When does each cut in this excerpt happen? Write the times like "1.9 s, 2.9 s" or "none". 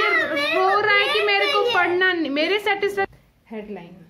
3.1 s